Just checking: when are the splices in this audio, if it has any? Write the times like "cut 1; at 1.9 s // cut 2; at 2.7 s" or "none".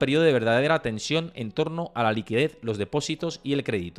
none